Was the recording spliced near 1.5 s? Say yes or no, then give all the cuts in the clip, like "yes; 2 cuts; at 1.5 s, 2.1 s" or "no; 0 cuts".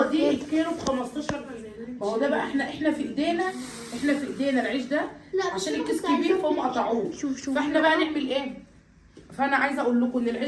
yes; 1 cut; at 1.5 s